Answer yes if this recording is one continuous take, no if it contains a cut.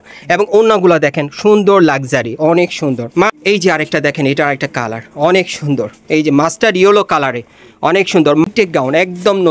no